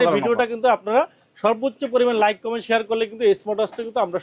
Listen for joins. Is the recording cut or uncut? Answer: uncut